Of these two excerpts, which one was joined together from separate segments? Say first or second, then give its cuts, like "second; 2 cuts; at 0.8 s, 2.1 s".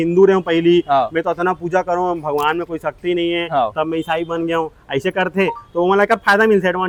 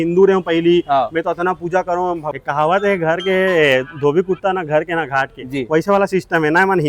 second; 1 cut; at 2.2 s